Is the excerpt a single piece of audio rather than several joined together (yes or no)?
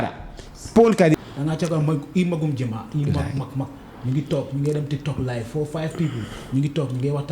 no